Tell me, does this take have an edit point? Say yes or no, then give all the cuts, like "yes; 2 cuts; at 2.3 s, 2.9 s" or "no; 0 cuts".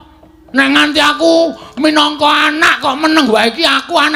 no; 0 cuts